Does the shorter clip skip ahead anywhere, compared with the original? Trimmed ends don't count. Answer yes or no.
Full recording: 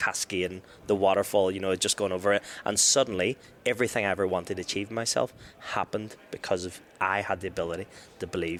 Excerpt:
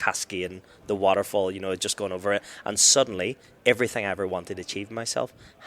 no